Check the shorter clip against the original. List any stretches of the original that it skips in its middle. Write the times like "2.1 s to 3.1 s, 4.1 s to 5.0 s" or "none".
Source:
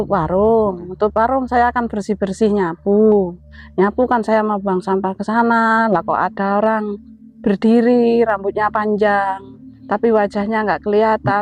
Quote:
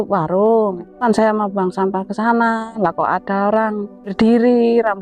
1.0 s to 4.1 s, 7.2 s to 7.6 s